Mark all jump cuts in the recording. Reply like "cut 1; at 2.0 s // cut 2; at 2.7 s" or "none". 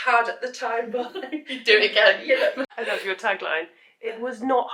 cut 1; at 2.6 s